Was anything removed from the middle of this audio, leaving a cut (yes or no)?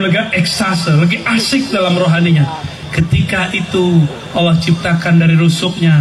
no